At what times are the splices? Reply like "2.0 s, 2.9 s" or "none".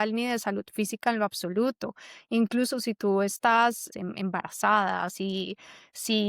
3.9 s